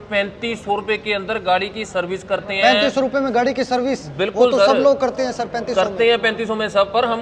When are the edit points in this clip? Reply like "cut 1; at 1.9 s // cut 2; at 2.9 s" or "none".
none